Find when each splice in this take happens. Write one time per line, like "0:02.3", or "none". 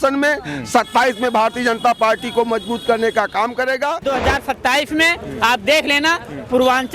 0:04.0